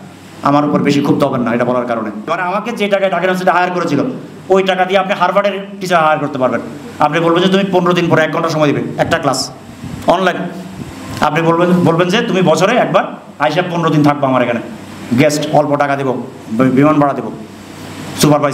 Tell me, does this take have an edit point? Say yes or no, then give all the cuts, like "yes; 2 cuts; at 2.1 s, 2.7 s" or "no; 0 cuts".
yes; 1 cut; at 2.3 s